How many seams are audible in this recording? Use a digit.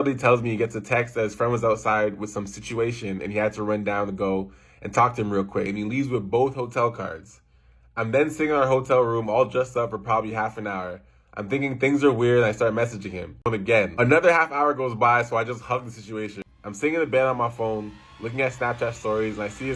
3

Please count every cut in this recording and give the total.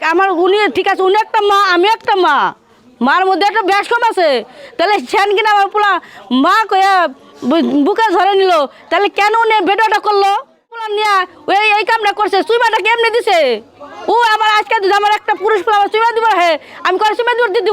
1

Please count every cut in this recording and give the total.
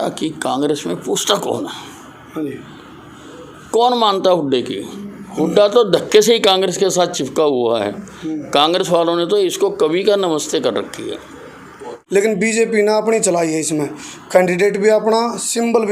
1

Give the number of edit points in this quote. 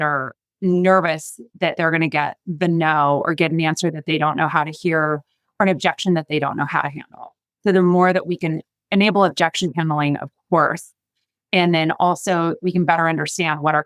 0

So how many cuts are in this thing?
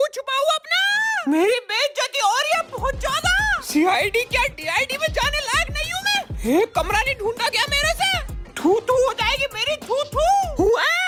0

